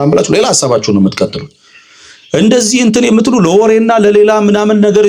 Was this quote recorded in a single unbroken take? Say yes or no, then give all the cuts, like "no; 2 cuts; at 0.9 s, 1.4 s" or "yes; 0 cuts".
yes; 0 cuts